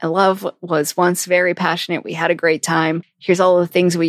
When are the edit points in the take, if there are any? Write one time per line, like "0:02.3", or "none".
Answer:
0:03.1